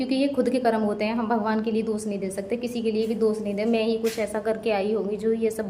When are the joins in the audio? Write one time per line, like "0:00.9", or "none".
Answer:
none